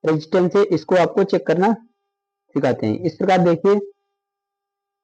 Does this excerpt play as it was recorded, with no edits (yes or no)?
yes